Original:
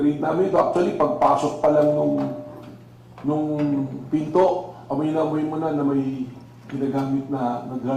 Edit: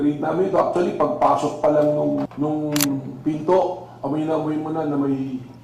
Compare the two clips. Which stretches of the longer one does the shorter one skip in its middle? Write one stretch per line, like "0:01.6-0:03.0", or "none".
0:02.3-0:03.2

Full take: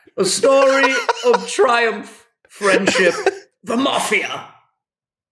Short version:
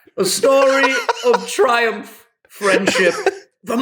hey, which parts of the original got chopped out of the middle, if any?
none

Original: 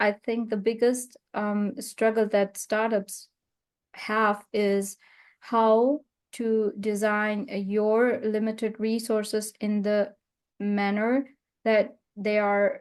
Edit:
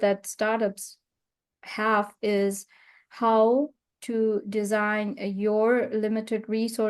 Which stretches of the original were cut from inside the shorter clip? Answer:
none

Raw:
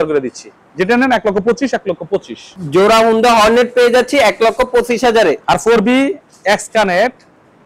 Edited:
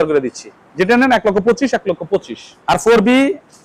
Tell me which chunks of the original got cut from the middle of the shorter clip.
0:02.6-0:05.4

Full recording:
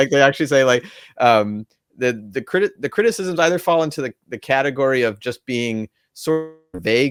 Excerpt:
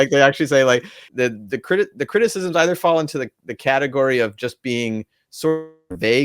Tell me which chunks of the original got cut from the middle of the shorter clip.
0:01.0-0:01.8

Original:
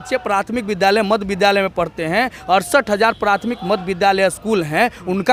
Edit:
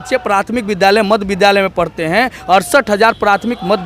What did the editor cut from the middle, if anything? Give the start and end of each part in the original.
none

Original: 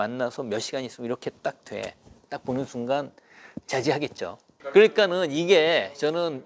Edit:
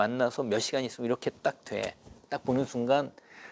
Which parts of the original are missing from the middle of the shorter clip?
none

